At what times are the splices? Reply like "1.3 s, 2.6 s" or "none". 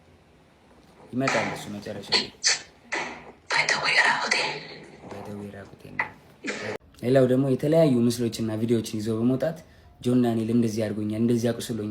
6.7 s